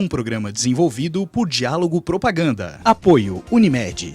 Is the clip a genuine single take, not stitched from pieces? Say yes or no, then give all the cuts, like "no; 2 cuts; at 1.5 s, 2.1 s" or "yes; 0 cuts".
no; 1 cut; at 2.7 s